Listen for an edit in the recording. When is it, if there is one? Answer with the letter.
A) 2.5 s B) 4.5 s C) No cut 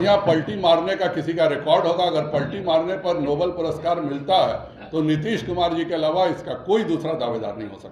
C